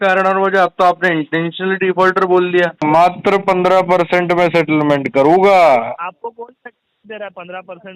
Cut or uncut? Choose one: cut